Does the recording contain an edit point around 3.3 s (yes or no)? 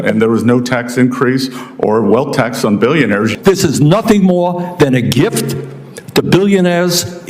yes